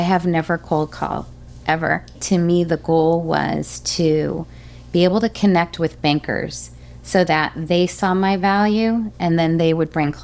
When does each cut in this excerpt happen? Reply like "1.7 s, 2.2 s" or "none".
2.2 s